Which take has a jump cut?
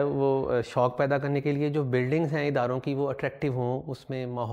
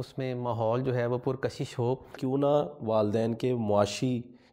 second; 1 cut; at 2.2 s

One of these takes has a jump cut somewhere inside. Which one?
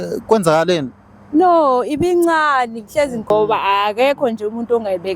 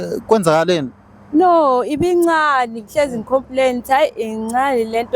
first; 1 cut; at 3.3 s

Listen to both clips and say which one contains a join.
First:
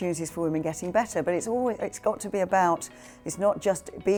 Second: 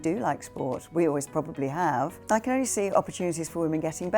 second; 1 cut; at 2.2 s

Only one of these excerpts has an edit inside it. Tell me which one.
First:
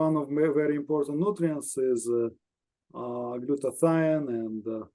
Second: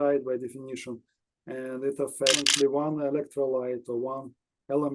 second; 1 cut; at 2.5 s

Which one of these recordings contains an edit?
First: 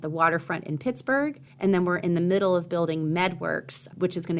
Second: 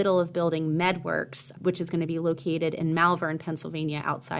first; 1 cut; at 1.5 s

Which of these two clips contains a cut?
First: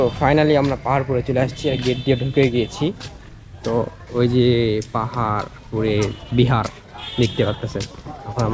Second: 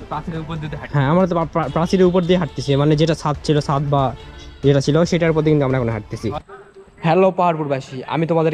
second; 1 cut; at 6.4 s

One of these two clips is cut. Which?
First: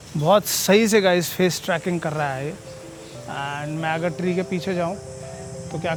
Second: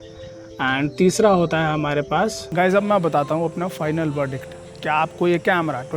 second; 1 cut; at 2.4 s

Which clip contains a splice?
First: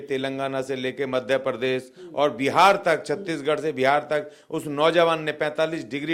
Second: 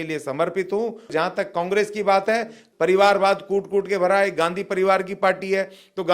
second; 2 cuts; at 1.1 s, 2.6 s

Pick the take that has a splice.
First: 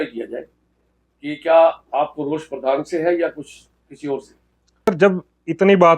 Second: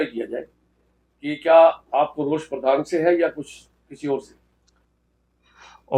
first; 1 cut; at 4.9 s

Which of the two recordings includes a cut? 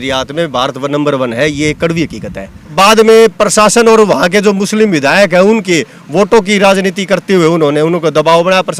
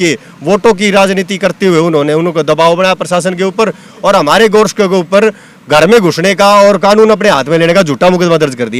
first; 1 cut; at 2.7 s

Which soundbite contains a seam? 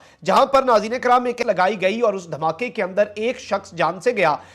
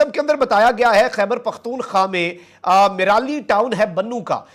first; 1 cut; at 1.4 s

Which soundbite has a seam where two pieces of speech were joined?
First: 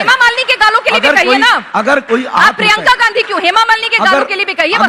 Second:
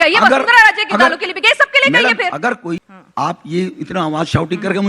second; 1 cut; at 2.9 s

